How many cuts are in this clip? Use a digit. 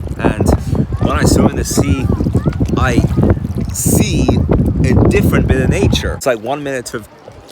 1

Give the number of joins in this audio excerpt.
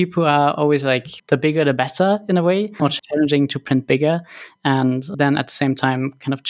2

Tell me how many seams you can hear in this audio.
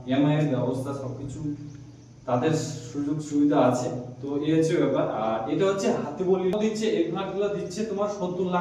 1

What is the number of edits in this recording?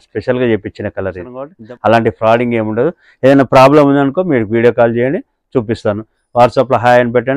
1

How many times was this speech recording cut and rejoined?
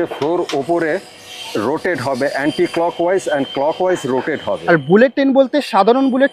1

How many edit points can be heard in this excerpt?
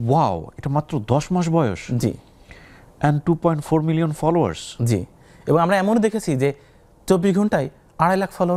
0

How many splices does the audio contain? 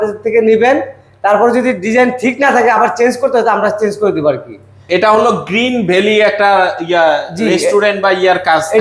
0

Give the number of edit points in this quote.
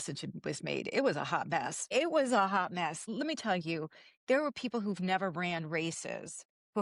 2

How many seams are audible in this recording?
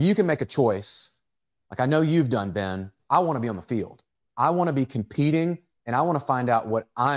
1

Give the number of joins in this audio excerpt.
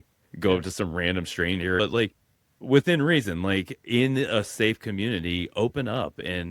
1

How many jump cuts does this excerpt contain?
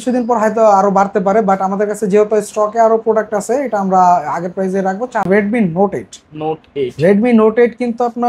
1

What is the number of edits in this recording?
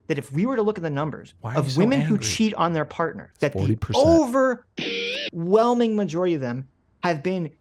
2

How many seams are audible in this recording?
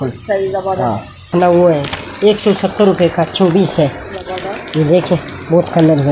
1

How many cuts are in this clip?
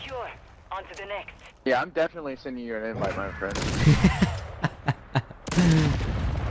0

